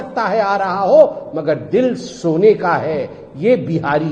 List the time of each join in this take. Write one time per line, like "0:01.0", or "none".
none

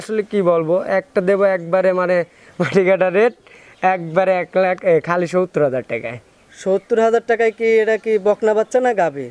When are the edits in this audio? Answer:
none

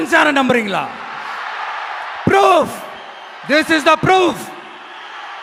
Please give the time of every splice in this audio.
none

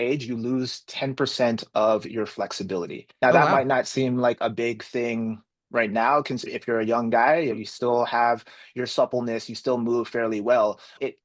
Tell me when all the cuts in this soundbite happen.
0:03.0

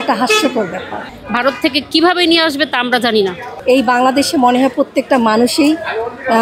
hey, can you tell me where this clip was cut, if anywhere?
0:01.0
0:03.5

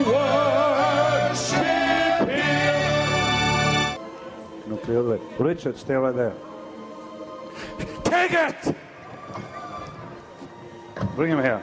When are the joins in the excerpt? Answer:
0:03.9
0:10.0

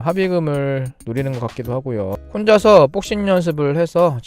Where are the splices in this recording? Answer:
0:02.2

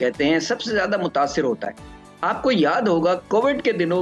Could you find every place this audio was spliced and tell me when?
none

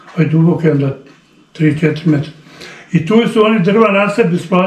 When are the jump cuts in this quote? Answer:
none

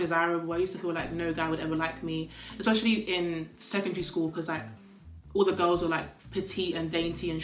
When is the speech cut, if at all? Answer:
none

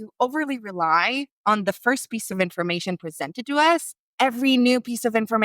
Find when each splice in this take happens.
0:01.3
0:04.0

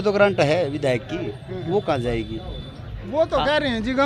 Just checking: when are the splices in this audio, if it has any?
none

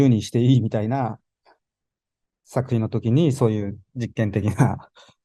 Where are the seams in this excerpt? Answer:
none

